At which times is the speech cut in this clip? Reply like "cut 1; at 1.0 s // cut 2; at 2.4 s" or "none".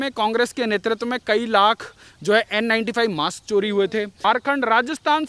cut 1; at 4.1 s